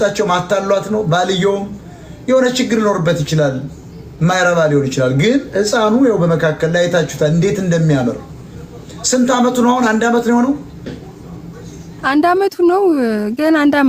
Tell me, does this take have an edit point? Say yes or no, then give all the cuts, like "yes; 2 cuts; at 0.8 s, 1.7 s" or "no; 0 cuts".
no; 0 cuts